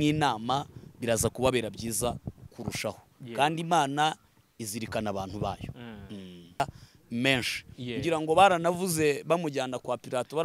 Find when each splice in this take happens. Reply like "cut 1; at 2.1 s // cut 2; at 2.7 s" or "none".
cut 1; at 6.6 s